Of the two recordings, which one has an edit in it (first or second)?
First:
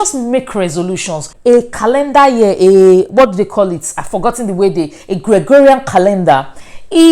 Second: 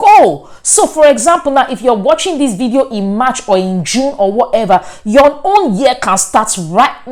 first